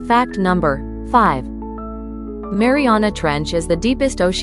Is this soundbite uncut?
no; 1 cut; at 1.0 s

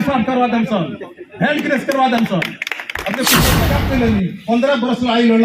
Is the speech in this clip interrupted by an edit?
yes; 1 cut; at 3.6 s

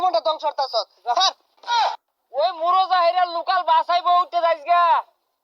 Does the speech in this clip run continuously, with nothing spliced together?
no; 1 cut; at 1.7 s

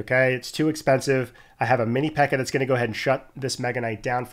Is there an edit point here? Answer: no; 0 cuts

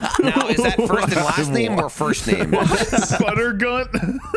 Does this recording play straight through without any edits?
yes; 0 cuts

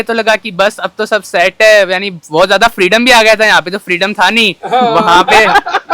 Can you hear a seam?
no; 0 cuts

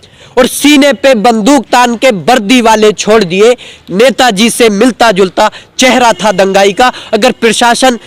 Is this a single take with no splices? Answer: yes; 0 cuts

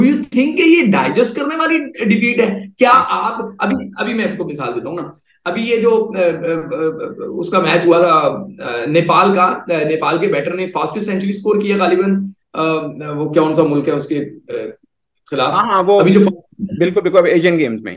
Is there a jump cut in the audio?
no; 0 cuts

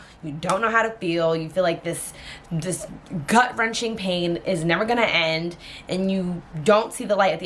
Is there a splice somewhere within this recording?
no; 0 cuts

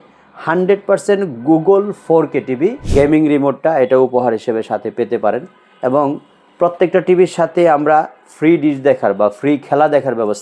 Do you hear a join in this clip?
yes; 1 cut; at 2.8 s

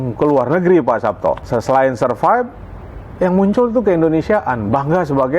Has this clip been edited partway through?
yes; 1 cut; at 1.4 s

